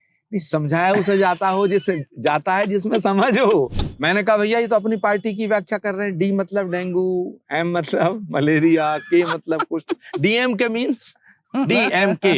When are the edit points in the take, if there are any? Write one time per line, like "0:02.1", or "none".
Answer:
0:03.8